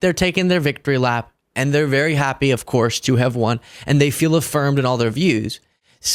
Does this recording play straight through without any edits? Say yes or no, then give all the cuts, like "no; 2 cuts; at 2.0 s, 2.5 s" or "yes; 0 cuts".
yes; 0 cuts